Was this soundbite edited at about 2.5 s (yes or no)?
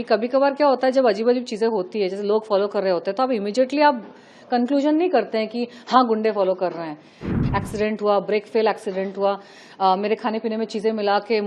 no